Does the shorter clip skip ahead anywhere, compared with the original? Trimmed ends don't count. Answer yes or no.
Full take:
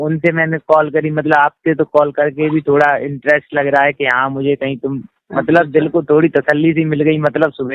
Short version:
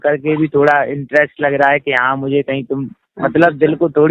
no